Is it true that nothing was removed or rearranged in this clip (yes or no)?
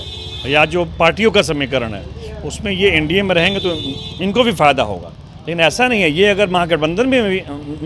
yes